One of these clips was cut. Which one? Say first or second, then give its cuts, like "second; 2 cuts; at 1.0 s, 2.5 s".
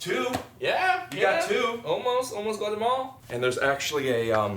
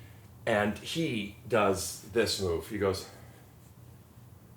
first; 1 cut; at 3.2 s